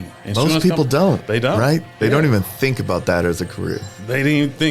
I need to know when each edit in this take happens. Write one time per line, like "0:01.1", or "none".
none

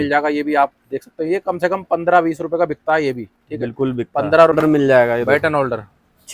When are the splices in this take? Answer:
0:04.6

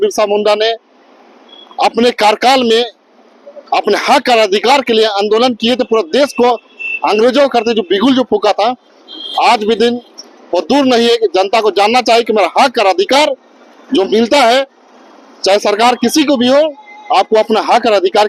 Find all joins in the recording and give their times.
none

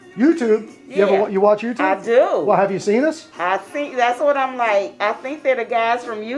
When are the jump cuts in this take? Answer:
none

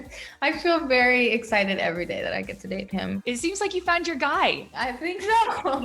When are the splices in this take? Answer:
0:03.1
0:04.7

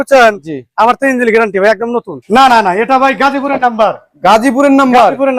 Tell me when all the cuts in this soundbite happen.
0:02.2

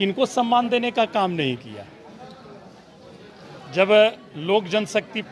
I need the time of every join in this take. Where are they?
0:03.4

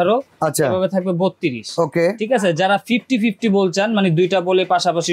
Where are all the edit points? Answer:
none

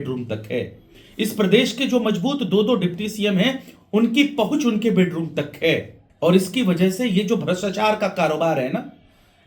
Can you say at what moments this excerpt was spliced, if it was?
none

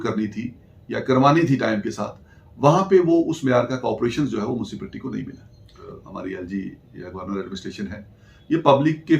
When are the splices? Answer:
0:06.0

